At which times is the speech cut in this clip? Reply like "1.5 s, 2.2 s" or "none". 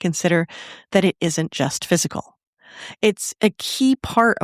3.2 s